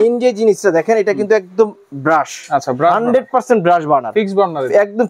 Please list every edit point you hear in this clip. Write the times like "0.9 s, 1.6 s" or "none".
none